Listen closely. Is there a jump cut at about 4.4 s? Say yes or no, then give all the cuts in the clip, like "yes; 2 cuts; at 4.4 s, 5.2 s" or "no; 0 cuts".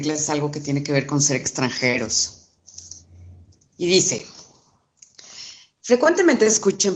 no; 1 cut; at 2.4 s